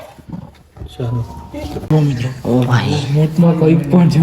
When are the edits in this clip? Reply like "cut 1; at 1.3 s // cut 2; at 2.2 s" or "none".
cut 1; at 1.9 s